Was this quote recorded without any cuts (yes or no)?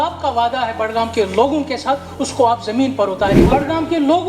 no